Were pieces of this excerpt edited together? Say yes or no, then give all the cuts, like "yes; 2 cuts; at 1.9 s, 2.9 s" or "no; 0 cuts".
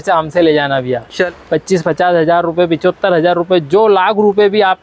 yes; 1 cut; at 1.2 s